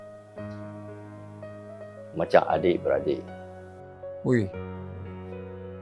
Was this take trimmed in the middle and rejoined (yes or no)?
yes